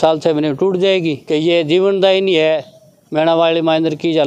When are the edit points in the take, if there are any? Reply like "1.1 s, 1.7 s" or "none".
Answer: 1.2 s